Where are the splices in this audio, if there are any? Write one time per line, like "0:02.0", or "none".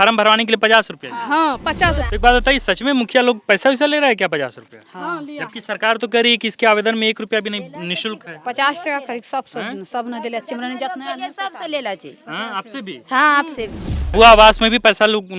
0:02.0
0:14.1